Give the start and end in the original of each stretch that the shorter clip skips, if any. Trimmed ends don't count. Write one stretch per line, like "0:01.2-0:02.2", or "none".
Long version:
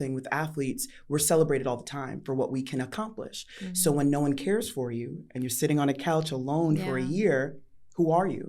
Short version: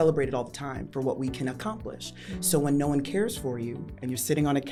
none